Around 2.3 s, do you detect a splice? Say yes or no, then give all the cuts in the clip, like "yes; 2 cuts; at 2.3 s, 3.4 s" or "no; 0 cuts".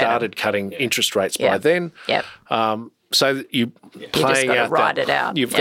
no; 0 cuts